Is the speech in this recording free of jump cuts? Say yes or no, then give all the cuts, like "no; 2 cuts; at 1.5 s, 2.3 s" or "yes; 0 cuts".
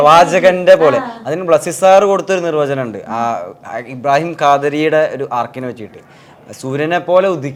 yes; 0 cuts